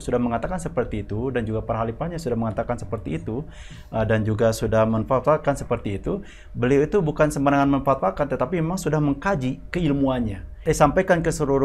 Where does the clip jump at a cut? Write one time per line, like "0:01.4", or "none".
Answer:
0:10.5